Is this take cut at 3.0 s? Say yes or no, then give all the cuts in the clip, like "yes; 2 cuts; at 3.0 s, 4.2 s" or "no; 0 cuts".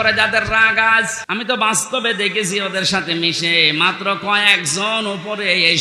no; 1 cut; at 1.2 s